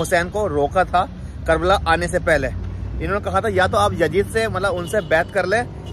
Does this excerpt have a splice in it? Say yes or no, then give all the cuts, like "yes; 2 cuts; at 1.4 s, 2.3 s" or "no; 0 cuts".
no; 0 cuts